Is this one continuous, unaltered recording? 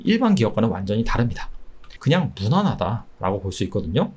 no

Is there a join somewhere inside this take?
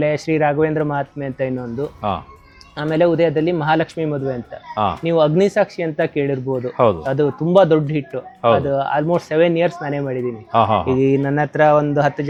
no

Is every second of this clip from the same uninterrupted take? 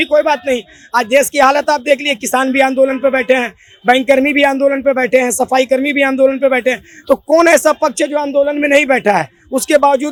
yes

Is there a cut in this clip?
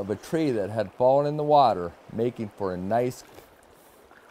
yes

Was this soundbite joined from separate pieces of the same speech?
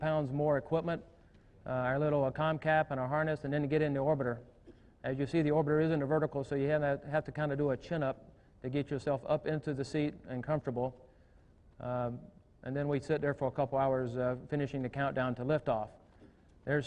yes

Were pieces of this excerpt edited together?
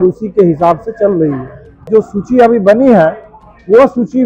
yes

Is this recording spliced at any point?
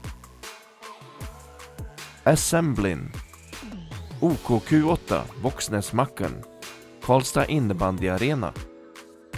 yes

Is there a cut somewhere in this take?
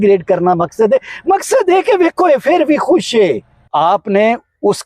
yes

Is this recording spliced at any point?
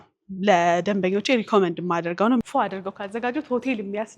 yes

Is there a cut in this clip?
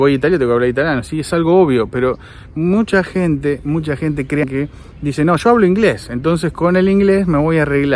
yes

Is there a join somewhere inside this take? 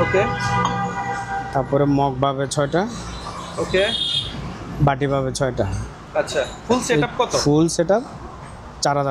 no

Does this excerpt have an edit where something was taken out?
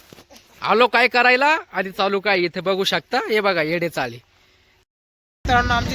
yes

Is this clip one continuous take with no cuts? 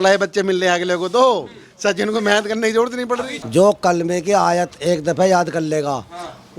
no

